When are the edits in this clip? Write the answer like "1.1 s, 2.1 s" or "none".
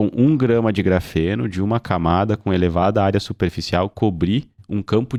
none